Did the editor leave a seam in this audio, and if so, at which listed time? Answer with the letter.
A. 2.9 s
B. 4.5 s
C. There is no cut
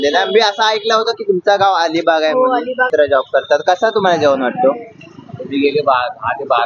A